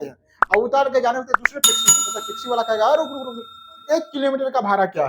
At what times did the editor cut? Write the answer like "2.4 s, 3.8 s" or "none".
3.8 s